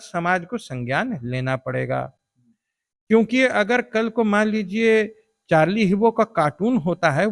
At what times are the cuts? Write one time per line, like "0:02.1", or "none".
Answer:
none